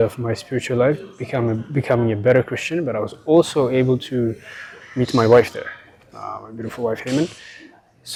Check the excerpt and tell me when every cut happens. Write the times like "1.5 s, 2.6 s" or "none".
none